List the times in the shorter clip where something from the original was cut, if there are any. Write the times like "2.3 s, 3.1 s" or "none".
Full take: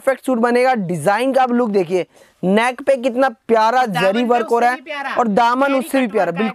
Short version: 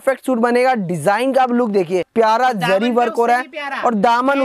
2.1 s